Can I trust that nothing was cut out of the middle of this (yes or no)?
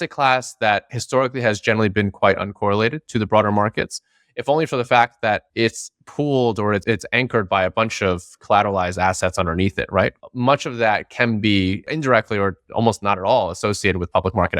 no